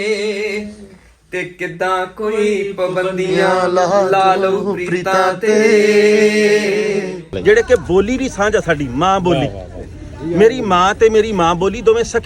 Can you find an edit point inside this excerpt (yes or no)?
yes